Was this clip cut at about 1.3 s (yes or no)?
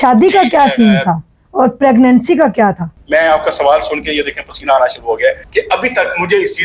no